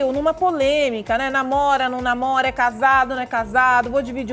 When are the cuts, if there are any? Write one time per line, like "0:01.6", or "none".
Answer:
none